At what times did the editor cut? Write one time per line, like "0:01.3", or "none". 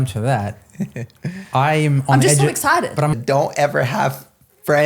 0:03.1